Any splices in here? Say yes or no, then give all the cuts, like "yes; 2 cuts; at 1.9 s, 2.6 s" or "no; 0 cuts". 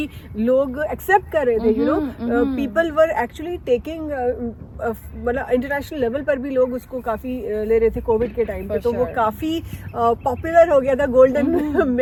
no; 0 cuts